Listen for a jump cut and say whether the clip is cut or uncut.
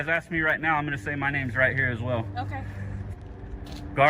cut